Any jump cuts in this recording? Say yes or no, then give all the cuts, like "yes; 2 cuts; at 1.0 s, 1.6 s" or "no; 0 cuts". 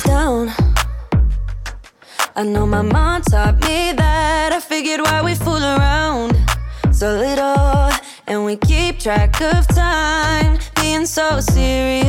no; 0 cuts